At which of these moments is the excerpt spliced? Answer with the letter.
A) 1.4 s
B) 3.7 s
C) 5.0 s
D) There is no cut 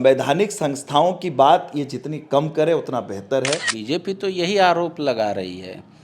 B